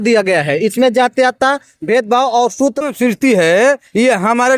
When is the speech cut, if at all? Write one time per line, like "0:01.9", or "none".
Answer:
0:02.8